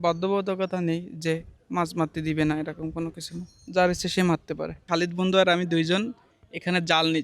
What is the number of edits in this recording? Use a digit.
1